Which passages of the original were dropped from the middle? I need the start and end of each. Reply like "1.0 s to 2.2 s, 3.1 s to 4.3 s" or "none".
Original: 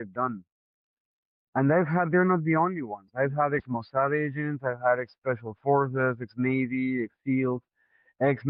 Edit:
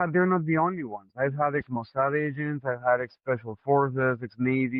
none